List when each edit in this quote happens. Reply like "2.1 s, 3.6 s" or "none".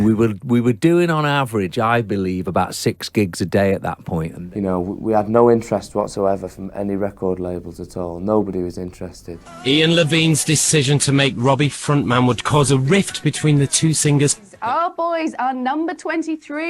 4.3 s, 9.5 s, 14.5 s